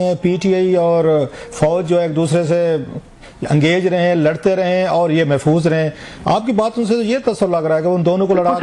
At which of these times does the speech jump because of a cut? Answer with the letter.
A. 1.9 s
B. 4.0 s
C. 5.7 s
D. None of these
D